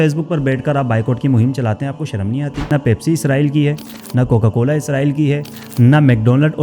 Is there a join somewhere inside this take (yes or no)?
yes